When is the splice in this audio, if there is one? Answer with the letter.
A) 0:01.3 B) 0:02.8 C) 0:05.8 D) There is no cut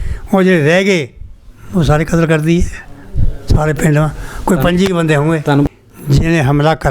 C